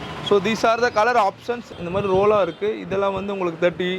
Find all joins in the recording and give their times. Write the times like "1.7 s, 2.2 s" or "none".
1.5 s